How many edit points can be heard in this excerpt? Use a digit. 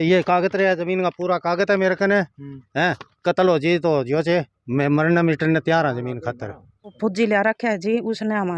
1